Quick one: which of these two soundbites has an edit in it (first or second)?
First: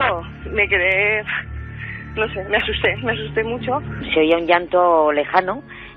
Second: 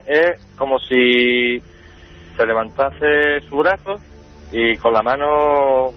first